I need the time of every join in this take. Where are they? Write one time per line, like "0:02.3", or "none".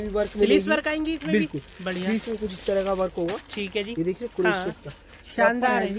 none